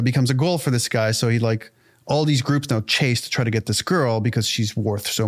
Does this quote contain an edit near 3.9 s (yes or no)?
no